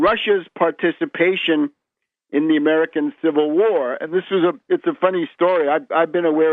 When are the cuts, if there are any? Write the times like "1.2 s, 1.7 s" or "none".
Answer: 2.0 s